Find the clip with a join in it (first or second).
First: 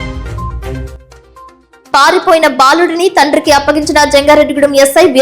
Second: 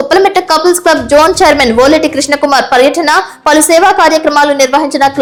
first